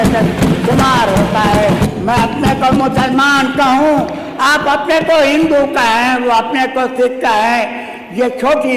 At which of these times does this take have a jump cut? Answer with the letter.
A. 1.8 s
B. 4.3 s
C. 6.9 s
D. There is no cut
A